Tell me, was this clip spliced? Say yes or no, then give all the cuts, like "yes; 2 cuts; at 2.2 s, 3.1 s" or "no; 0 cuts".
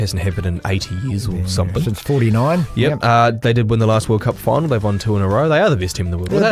no; 0 cuts